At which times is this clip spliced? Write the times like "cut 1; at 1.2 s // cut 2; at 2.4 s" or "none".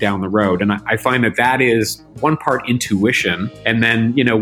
cut 1; at 2.0 s // cut 2; at 3.5 s